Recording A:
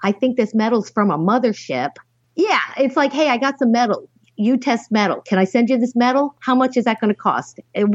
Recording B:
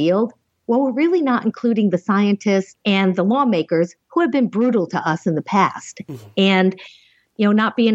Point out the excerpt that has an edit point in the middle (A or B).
B